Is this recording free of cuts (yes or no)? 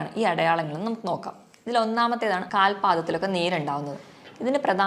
no